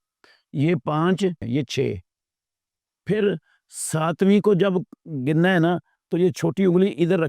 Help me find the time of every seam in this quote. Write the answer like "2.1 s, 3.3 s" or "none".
1.4 s